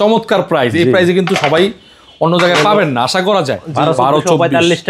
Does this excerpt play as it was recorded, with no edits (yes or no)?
no